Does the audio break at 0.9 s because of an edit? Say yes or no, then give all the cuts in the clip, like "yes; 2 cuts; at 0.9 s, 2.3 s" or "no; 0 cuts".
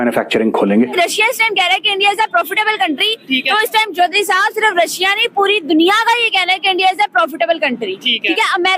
yes; 1 cut; at 0.9 s